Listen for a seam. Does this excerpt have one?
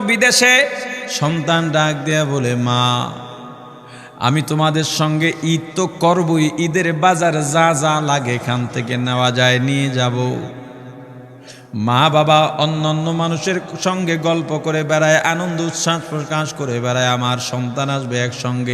yes; 1 cut; at 1.0 s

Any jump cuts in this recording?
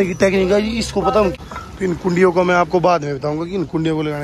yes; 1 cut; at 1.3 s

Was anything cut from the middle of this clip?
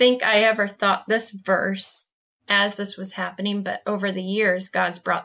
no; 0 cuts

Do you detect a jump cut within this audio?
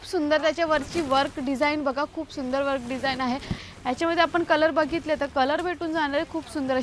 yes; 1 cut; at 3.6 s

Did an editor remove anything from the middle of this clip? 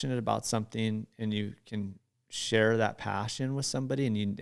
no; 0 cuts

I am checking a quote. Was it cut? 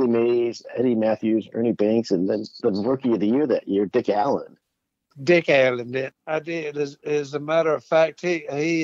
yes; 2 cuts; at 5.1 s, 6.1 s

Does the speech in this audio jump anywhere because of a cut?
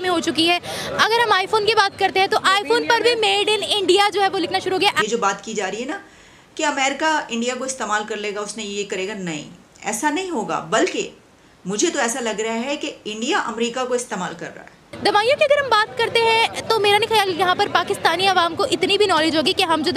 yes; 2 cuts; at 5.0 s, 14.9 s

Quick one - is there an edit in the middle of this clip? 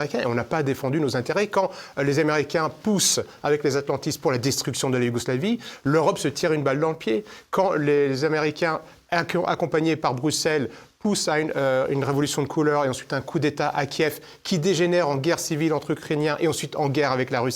no; 0 cuts

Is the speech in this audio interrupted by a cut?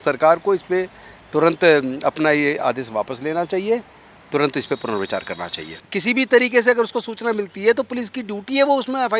yes; 1 cut; at 5.7 s

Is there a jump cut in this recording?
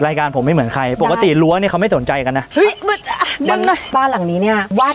yes; 1 cut; at 3.9 s

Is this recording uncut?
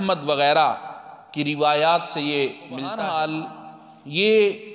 no; 1 cut; at 2.9 s

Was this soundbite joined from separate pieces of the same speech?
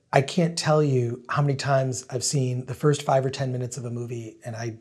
no; 0 cuts

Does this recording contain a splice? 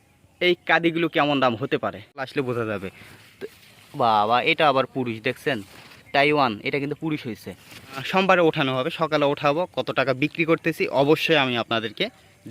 yes; 2 cuts; at 2.3 s, 8.0 s

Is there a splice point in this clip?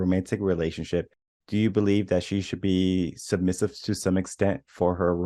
no; 0 cuts

